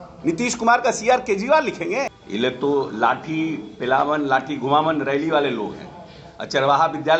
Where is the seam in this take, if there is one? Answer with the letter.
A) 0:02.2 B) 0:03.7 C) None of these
A